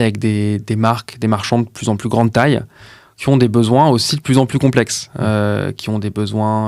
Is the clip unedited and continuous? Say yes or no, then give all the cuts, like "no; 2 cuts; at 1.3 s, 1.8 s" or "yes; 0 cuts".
yes; 0 cuts